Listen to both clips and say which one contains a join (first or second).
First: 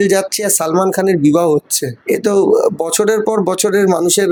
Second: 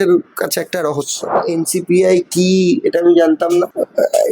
second